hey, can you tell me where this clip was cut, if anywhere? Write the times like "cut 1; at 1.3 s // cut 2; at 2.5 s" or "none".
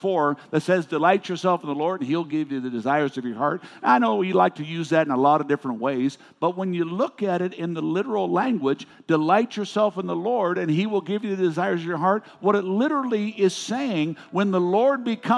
none